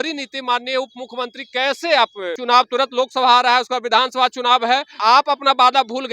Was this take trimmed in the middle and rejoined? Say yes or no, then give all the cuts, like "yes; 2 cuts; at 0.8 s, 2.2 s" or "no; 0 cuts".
yes; 2 cuts; at 2.3 s, 5.0 s